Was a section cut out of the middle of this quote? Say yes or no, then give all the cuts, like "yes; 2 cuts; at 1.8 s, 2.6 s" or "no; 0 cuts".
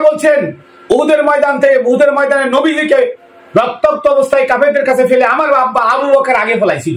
no; 0 cuts